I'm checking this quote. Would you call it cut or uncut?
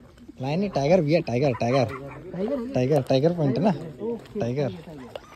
uncut